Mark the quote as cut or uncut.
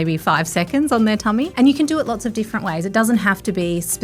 cut